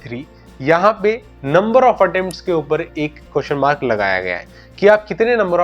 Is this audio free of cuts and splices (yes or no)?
yes